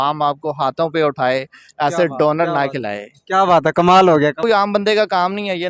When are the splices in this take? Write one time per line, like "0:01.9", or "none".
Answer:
0:04.4